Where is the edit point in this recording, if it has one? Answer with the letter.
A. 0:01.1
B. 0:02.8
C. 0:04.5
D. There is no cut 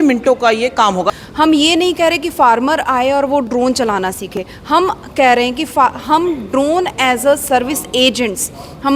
A